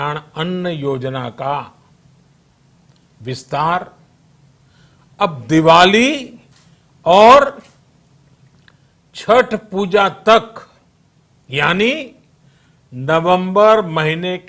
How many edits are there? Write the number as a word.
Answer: zero